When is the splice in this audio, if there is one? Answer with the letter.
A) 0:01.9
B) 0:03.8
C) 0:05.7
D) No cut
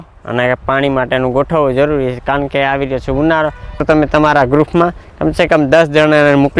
B